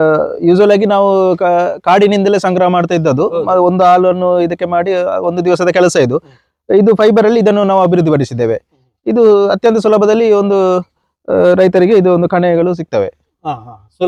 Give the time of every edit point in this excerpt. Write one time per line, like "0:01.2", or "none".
none